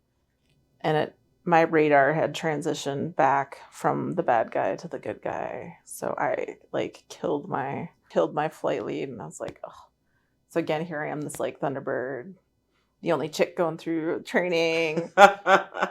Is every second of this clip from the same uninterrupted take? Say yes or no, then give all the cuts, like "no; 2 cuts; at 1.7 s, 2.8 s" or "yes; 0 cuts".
no; 1 cut; at 8.0 s